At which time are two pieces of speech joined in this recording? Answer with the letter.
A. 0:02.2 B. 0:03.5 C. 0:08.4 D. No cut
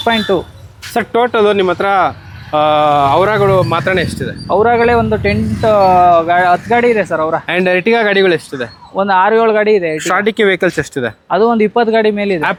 D